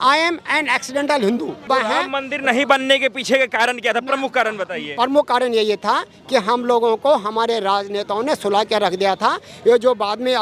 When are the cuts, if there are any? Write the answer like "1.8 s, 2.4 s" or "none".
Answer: 1.6 s

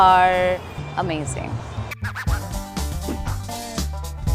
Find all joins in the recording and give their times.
1.9 s

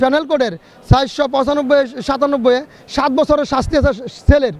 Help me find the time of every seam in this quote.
none

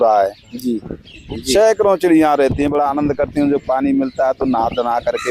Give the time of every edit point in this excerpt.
1.2 s

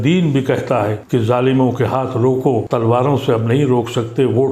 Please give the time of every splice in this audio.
1.0 s, 2.7 s

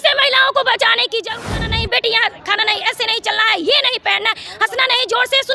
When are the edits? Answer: 1.3 s

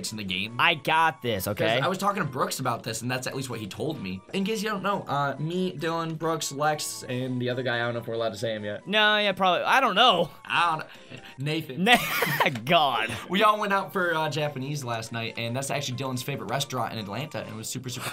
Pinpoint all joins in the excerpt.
4.3 s

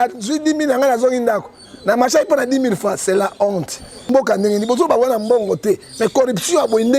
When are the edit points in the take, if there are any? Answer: 4.1 s

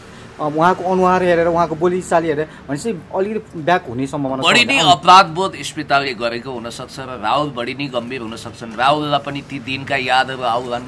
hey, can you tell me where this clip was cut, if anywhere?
none

